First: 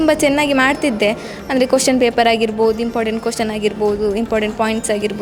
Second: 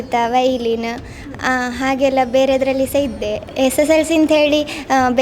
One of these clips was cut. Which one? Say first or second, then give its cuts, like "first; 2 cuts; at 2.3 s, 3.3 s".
second; 1 cut; at 3.5 s